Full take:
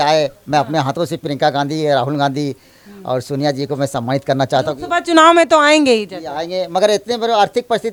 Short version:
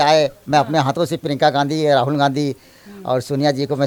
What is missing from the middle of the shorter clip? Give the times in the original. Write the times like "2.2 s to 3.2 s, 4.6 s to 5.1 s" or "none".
none